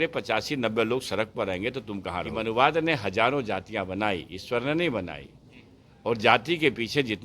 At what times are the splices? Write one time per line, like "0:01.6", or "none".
0:02.3